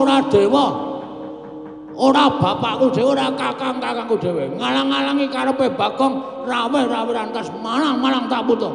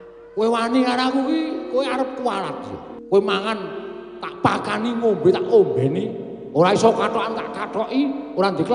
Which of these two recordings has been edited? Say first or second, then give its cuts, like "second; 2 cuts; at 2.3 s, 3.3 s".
second; 1 cut; at 2.8 s